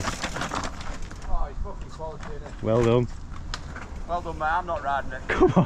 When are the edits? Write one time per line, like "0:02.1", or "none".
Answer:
none